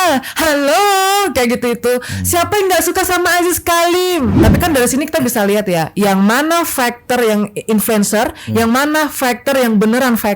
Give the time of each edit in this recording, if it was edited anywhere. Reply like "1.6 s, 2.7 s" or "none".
4.4 s